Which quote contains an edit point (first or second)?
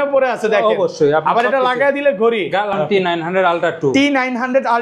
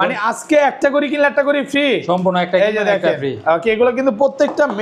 first